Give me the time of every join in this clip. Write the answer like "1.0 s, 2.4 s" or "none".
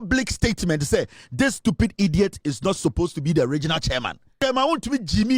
4.4 s